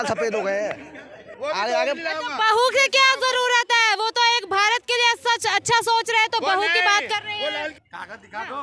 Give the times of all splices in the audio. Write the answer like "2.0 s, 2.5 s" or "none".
none